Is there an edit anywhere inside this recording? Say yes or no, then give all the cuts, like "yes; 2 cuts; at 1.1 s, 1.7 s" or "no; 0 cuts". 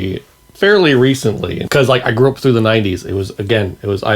yes; 1 cut; at 1.5 s